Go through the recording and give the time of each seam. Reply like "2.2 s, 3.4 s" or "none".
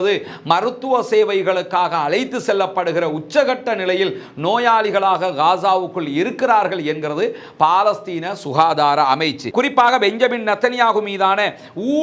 9.4 s